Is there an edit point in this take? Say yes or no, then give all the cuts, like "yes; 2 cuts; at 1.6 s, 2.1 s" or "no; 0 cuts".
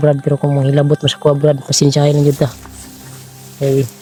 no; 0 cuts